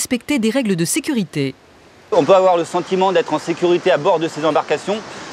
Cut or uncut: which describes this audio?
uncut